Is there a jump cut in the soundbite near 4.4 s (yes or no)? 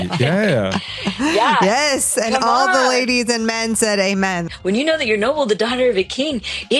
yes